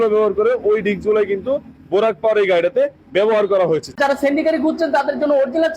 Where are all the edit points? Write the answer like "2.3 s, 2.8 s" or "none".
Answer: 4.0 s